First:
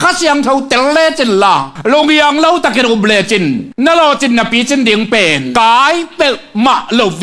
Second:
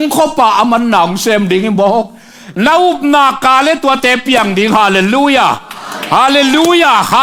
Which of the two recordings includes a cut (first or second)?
first